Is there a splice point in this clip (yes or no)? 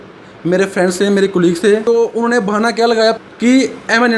yes